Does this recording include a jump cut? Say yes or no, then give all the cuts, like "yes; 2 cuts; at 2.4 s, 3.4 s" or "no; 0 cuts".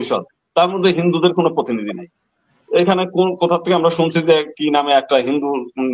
no; 0 cuts